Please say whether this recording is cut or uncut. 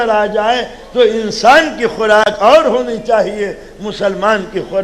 uncut